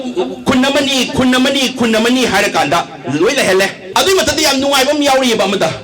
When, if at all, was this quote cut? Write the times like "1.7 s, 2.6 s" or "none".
3.8 s